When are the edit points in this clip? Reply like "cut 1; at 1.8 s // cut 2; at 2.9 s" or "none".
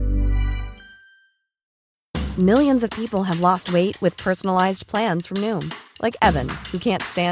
cut 1; at 1.7 s